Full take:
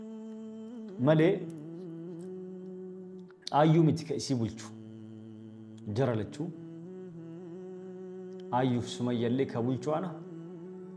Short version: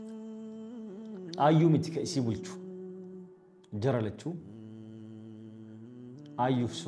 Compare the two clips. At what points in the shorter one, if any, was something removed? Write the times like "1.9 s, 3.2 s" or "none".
1.0 s